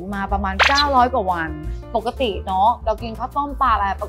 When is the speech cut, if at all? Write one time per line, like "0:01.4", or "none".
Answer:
0:01.5